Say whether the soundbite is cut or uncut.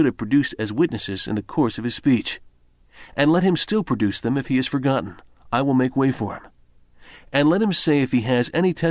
cut